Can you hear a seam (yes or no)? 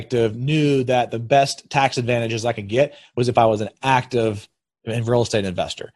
no